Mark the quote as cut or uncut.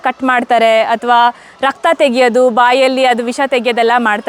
uncut